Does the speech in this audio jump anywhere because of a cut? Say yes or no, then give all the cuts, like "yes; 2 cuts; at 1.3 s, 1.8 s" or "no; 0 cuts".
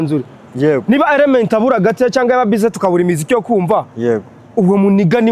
no; 0 cuts